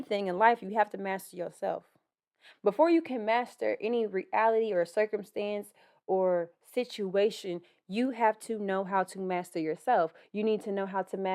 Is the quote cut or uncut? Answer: uncut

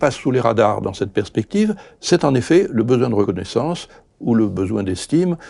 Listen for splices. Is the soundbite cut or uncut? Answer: cut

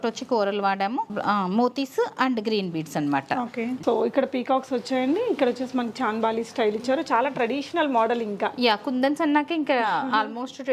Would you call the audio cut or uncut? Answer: cut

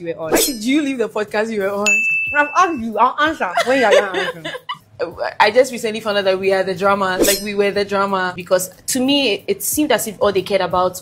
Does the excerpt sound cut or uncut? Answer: cut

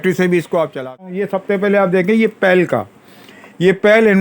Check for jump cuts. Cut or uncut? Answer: cut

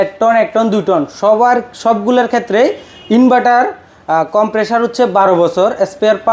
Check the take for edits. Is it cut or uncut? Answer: uncut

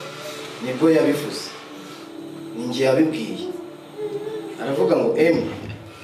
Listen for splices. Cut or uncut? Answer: cut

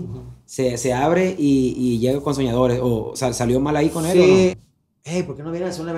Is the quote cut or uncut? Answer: cut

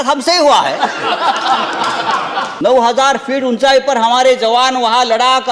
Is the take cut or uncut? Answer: cut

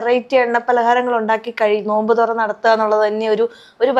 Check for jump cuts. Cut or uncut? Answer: uncut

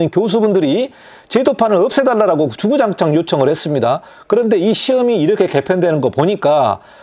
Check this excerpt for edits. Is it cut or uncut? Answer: uncut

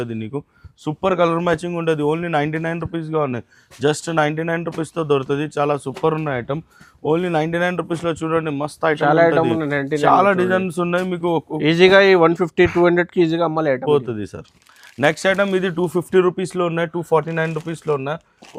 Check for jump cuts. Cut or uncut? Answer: uncut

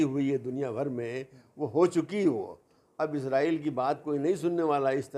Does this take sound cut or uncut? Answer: uncut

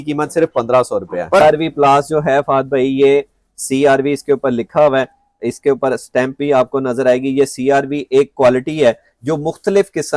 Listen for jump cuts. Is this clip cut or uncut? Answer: cut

